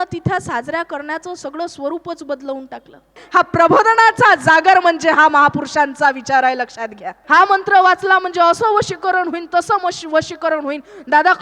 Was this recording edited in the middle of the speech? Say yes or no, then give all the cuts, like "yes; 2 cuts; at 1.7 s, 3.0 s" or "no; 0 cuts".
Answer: yes; 2 cuts; at 3.2 s, 7.1 s